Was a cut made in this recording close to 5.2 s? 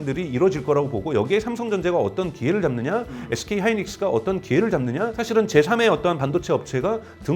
yes; 1 cut; at 5.2 s

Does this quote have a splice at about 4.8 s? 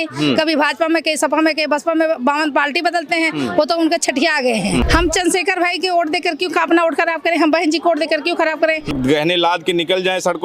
yes; 2 cuts; at 4.8 s, 8.9 s

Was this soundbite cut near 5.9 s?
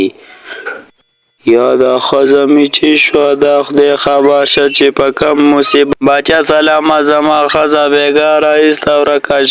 yes; 1 cut; at 5.9 s

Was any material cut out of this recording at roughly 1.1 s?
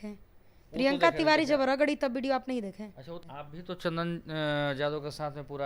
no; 1 cut; at 3.2 s

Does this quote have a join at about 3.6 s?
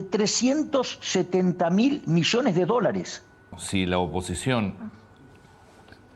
yes; 1 cut; at 3.6 s

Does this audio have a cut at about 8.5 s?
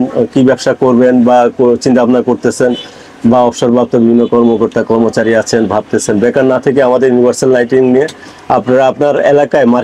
no; 0 cuts

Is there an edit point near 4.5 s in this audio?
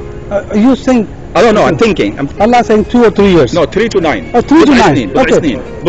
no; 1 cut; at 2.2 s

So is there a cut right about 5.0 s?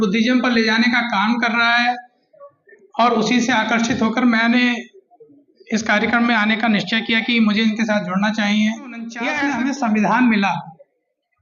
no; 1 cut; at 9.2 s

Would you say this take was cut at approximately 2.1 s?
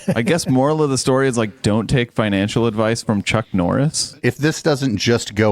no; 1 cut; at 4.1 s

